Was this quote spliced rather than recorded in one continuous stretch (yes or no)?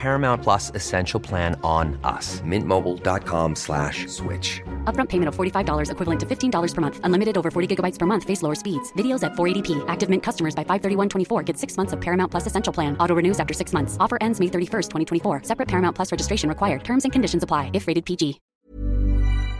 yes